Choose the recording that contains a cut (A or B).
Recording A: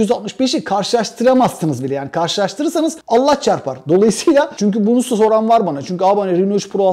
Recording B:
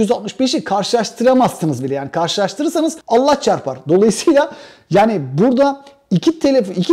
A